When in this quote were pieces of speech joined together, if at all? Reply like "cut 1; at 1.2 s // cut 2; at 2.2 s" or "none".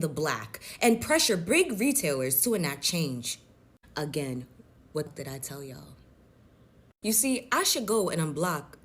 cut 1; at 5.1 s

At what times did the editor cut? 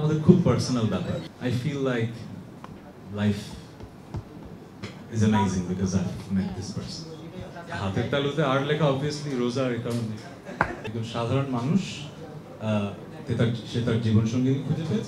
cut 1; at 1.3 s // cut 2; at 7.6 s // cut 3; at 10.8 s

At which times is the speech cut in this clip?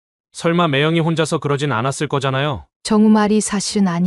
cut 1; at 2.7 s

